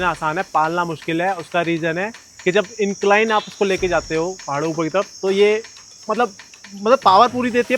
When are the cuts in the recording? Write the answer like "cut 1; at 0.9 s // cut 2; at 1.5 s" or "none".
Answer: none